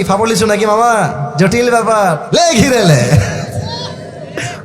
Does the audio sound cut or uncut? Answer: cut